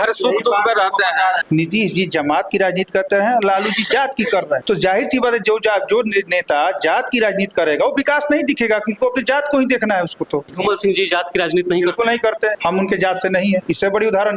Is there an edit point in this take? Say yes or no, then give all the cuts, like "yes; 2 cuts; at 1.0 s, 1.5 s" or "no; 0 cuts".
yes; 4 cuts; at 1.4 s, 4.6 s, 10.5 s, 12.6 s